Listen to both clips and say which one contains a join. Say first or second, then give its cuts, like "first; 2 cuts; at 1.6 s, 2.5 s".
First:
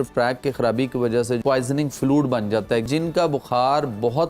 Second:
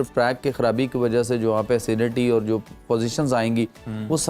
first; 2 cuts; at 1.4 s, 2.9 s